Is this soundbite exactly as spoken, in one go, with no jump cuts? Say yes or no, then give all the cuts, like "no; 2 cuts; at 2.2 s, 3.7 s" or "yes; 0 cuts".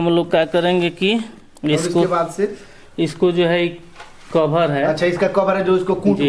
yes; 0 cuts